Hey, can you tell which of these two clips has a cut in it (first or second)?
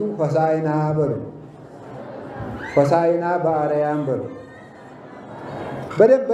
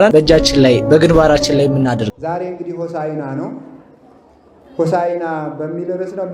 second